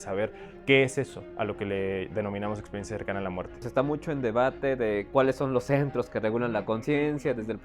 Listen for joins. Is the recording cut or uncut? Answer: cut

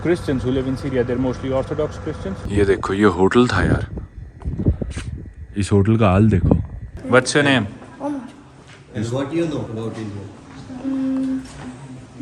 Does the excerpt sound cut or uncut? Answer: cut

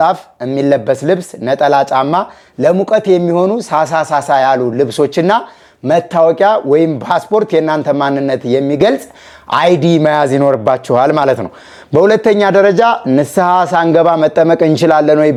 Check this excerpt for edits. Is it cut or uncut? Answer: uncut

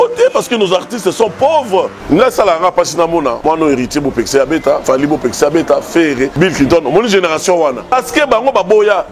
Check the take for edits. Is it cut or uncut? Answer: cut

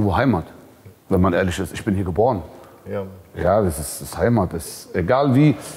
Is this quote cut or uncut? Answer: uncut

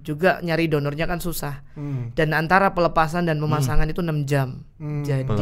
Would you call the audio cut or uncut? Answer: uncut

